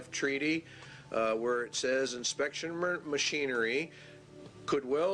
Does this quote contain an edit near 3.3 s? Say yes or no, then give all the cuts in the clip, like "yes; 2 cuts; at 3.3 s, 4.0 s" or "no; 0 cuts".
no; 1 cut; at 1.6 s